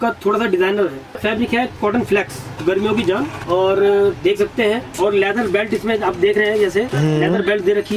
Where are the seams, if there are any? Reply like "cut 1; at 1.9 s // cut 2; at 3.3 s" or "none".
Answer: cut 1; at 1.1 s // cut 2; at 2.5 s // cut 3; at 3.4 s // cut 4; at 4.9 s